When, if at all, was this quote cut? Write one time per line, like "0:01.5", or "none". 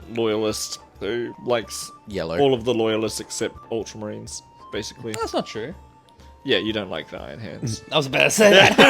0:01.4
0:03.6